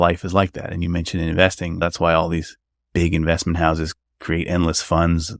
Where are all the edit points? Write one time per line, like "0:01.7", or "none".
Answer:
0:01.8